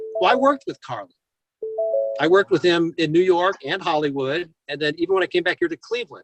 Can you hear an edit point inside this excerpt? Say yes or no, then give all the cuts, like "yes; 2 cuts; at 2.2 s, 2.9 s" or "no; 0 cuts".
no; 0 cuts